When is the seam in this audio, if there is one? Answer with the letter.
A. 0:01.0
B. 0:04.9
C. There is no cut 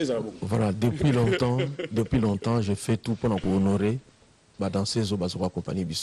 B